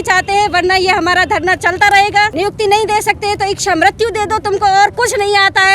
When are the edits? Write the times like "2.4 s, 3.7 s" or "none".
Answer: 2.3 s